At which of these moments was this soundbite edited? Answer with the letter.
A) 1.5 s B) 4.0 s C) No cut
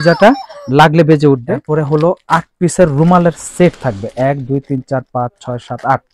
A